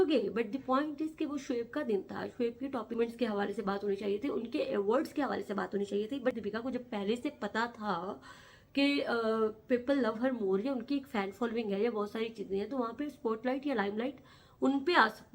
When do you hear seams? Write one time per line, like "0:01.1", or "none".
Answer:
0:02.9
0:06.4